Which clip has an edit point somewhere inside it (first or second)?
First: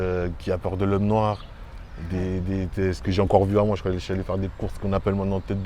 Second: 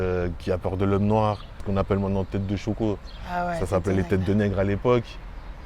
second